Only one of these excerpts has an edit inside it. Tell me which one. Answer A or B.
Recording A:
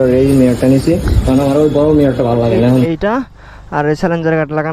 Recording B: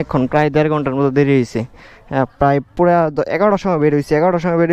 A